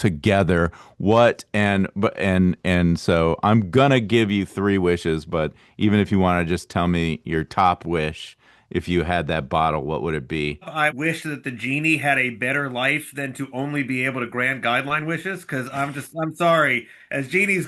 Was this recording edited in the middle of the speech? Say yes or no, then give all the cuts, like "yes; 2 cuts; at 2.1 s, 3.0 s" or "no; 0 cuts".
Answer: yes; 1 cut; at 10.7 s